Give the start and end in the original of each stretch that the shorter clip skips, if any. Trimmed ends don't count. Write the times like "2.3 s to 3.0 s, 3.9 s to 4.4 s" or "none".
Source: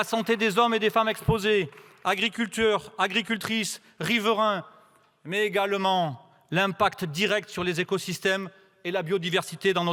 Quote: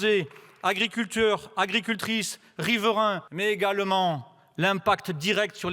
4.7 s to 5.2 s